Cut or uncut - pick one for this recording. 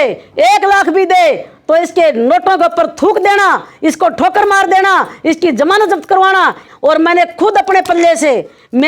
cut